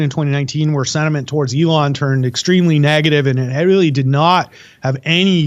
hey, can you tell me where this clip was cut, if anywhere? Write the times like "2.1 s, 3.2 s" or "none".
none